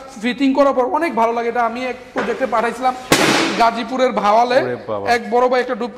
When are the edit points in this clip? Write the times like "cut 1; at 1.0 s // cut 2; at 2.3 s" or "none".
none